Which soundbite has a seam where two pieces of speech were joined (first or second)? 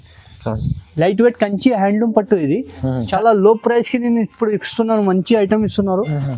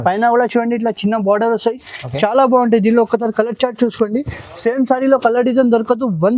first